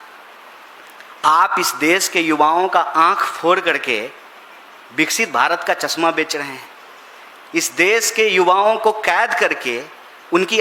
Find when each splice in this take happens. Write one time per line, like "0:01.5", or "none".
none